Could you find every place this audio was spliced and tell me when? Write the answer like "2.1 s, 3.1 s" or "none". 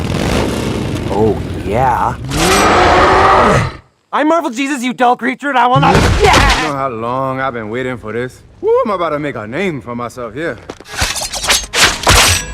6.7 s, 8.4 s

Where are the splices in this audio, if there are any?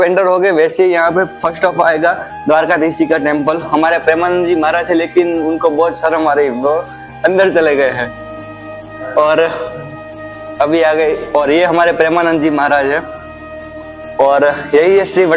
none

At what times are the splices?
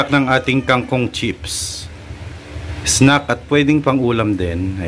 2.7 s

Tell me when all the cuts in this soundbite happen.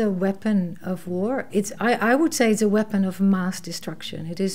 none

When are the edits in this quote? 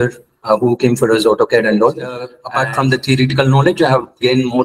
2.4 s

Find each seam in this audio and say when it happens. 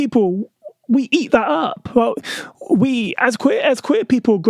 none

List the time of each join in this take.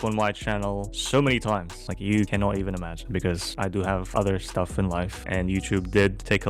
none

